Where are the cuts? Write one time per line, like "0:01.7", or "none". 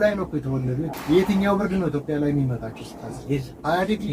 0:00.9